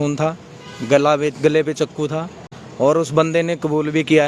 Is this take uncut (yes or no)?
yes